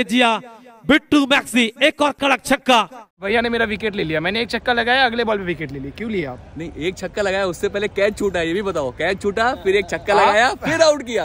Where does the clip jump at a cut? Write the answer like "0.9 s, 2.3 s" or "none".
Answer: 3.2 s

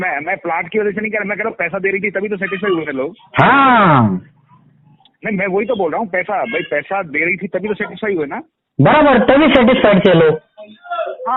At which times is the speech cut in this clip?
none

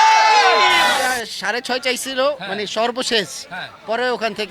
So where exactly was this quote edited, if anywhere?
1.0 s

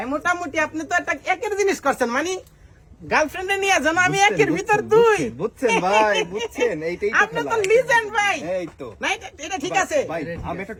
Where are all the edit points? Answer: none

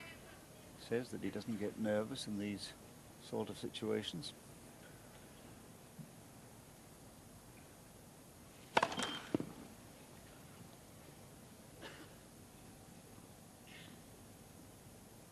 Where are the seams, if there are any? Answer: 3.7 s

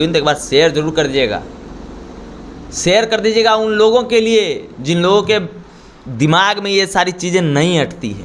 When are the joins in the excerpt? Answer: none

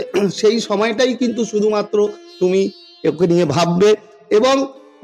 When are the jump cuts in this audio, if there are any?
none

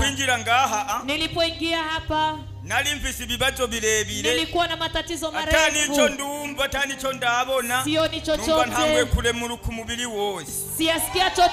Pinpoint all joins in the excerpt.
none

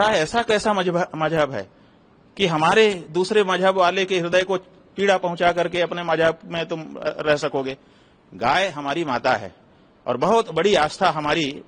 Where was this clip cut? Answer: none

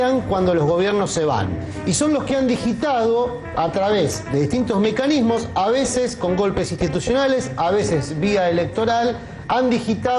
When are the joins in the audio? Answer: 1.7 s

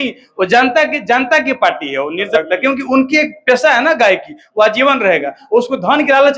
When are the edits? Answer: 2.3 s

